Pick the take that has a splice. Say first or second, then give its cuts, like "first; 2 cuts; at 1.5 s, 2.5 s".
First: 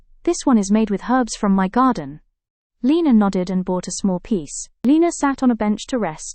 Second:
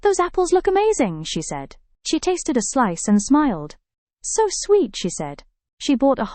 first; 1 cut; at 4.6 s